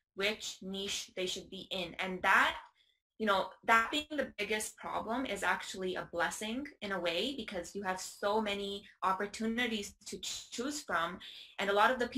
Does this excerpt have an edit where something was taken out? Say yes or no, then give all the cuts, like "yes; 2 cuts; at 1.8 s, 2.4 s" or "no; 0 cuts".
no; 0 cuts